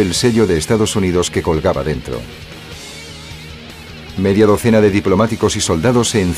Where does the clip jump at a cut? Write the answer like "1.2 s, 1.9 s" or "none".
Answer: 4.9 s

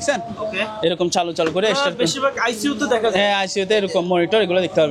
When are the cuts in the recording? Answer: none

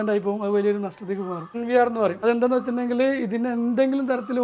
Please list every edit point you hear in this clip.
1.5 s, 2.2 s

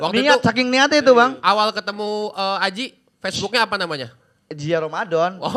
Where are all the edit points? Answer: none

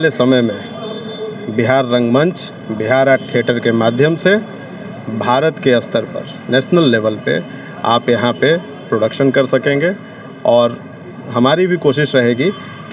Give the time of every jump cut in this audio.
none

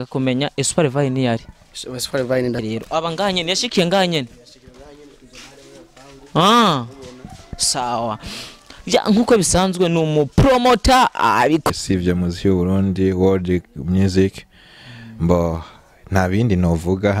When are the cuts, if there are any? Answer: 2.6 s, 11.7 s

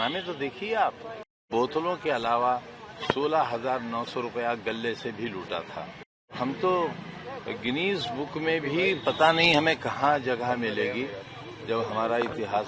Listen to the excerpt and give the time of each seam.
1.4 s, 6.3 s

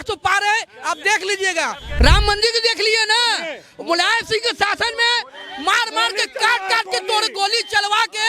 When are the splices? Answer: 1.8 s

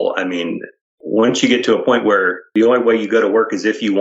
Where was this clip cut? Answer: 0.9 s, 2.4 s

